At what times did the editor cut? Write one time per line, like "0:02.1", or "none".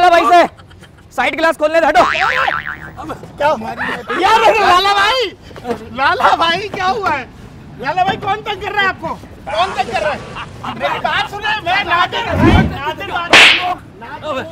none